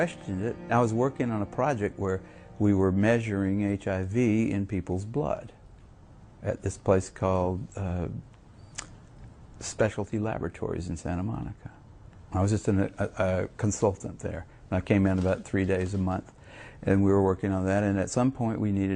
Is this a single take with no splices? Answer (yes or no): yes